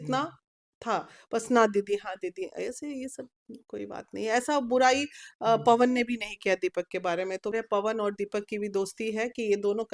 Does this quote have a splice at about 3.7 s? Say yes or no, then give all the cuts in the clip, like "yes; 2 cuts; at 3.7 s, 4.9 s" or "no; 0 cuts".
no; 1 cut; at 7.5 s